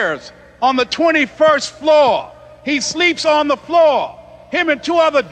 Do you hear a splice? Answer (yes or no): no